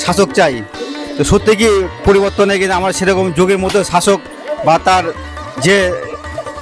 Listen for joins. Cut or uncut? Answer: uncut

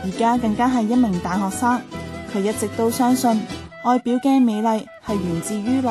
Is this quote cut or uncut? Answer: uncut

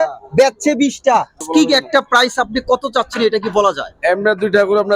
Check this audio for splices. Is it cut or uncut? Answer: cut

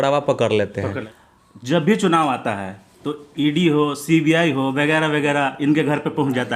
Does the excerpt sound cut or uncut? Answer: cut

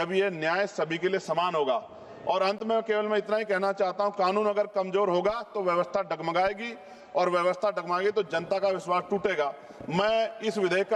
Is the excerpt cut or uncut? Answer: uncut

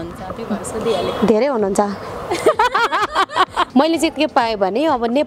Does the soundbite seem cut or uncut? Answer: cut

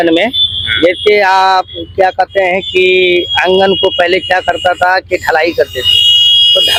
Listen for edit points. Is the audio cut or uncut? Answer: uncut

